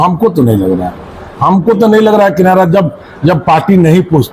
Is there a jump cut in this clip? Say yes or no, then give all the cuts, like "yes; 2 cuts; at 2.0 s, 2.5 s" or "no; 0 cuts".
no; 0 cuts